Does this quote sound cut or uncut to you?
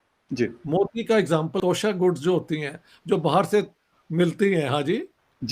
cut